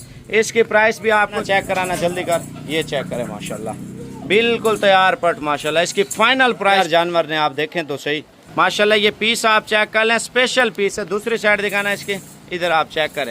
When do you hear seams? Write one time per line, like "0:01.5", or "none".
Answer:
0:01.4
0:06.8